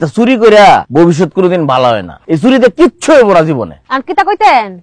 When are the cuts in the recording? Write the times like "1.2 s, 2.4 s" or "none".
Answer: 0.9 s, 2.1 s, 3.8 s